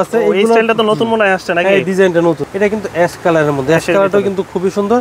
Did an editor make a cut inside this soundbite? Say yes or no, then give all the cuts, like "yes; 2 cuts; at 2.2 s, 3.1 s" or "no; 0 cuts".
yes; 1 cut; at 2.4 s